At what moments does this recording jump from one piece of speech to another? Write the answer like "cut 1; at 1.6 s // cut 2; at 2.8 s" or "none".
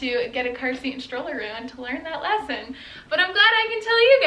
none